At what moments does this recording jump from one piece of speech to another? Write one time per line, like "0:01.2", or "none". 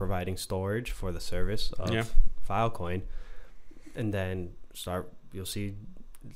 none

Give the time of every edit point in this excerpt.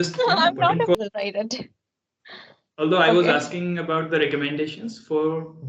0:01.0

